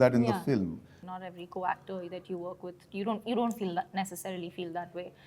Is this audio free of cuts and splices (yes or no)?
no